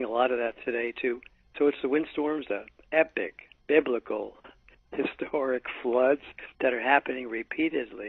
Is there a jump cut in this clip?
no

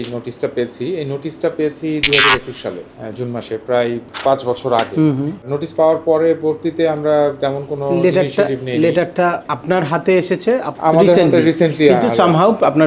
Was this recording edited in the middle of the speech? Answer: yes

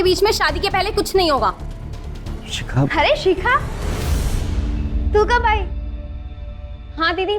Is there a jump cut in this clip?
no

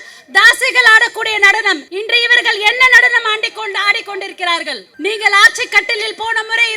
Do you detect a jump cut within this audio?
yes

